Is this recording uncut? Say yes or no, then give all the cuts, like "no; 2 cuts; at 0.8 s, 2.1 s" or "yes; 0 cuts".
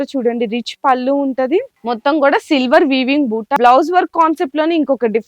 no; 2 cuts; at 1.7 s, 3.6 s